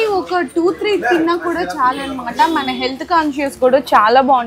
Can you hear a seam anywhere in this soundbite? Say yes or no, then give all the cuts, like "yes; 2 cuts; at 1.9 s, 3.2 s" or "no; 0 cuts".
no; 0 cuts